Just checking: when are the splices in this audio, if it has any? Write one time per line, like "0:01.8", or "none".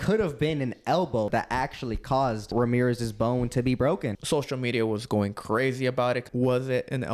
0:01.3
0:02.5
0:04.2
0:06.3